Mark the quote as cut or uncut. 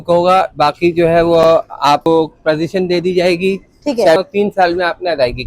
cut